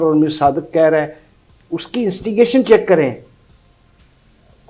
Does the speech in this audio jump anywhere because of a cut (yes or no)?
no